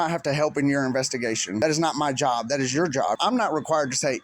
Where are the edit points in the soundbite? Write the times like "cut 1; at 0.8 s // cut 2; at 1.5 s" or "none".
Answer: cut 1; at 1.6 s // cut 2; at 3.2 s